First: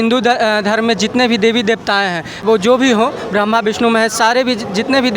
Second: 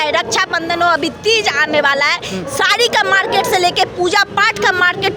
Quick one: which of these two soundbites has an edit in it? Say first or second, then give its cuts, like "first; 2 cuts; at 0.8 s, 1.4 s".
first; 1 cut; at 2.4 s